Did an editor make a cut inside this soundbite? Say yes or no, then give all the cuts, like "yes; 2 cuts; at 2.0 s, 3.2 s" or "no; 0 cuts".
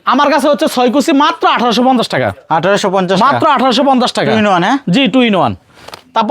no; 0 cuts